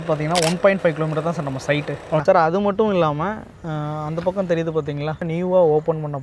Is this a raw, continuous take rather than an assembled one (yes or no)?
no